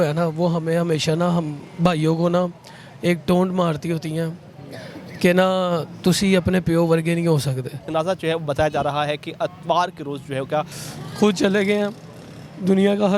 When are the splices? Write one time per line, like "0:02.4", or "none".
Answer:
0:07.9
0:10.8